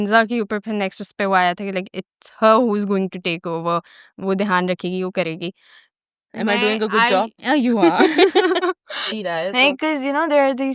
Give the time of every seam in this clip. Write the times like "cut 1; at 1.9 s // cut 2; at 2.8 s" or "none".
cut 1; at 9.2 s